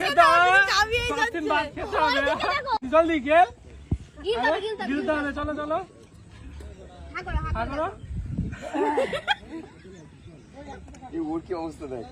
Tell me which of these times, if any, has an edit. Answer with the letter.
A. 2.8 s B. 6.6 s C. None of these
A